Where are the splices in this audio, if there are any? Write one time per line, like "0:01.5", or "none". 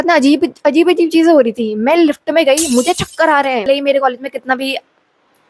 0:03.6